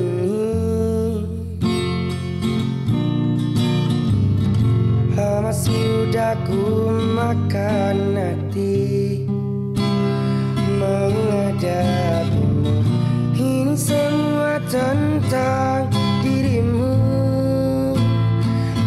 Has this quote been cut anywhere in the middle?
no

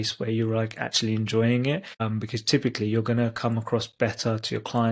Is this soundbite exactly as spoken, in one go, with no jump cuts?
no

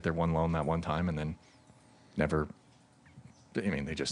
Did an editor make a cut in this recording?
no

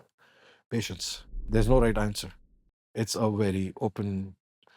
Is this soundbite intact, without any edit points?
no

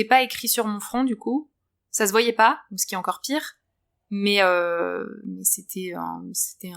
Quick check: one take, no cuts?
yes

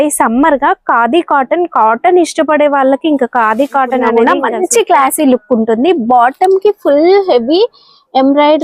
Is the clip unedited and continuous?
no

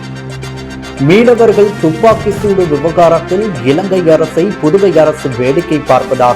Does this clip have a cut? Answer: yes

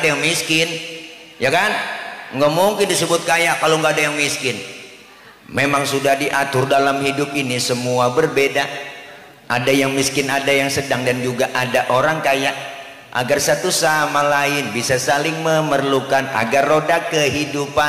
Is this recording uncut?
yes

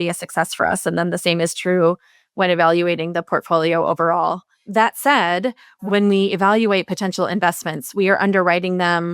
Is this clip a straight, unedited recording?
no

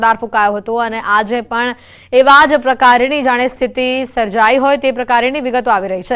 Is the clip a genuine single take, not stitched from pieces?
no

